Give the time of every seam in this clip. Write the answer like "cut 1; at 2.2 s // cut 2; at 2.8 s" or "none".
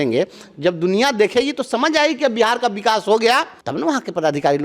cut 1; at 3.6 s